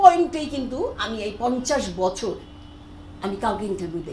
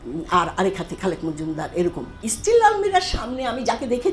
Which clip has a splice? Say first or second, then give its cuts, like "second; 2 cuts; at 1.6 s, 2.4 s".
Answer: second; 1 cut; at 2.2 s